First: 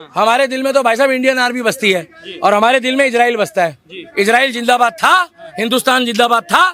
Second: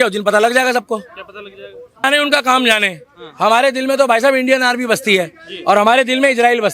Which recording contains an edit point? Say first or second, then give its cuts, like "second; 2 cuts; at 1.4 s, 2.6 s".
second; 1 cut; at 2.1 s